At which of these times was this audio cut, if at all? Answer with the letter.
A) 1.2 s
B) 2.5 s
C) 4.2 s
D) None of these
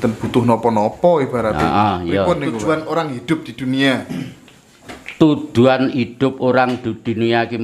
B